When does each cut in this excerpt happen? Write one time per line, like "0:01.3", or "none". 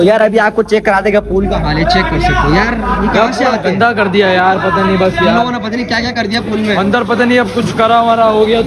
none